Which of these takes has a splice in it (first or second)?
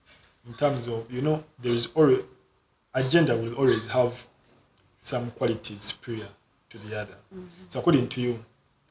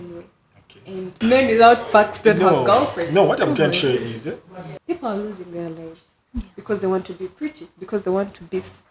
second